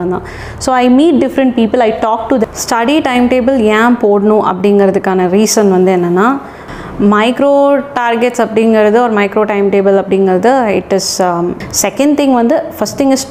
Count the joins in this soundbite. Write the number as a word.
three